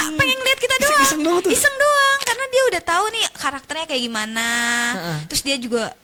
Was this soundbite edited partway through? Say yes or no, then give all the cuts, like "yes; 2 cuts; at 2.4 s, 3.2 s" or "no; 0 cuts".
no; 0 cuts